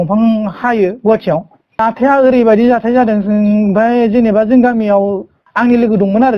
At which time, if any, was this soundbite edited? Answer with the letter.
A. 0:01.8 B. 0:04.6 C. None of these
A